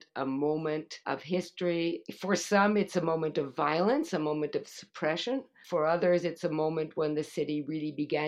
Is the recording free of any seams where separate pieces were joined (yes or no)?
no